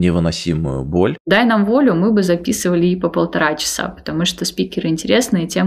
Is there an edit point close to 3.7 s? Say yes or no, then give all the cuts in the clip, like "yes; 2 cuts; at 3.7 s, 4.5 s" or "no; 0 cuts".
no; 1 cut; at 1.2 s